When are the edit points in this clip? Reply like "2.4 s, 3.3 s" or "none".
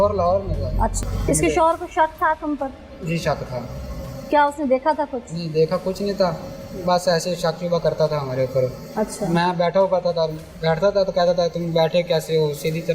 0.9 s